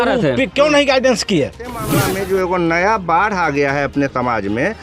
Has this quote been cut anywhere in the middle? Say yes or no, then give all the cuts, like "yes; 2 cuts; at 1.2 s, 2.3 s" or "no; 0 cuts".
yes; 1 cut; at 1.9 s